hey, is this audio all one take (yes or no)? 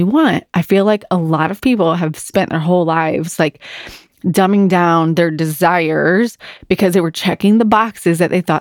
yes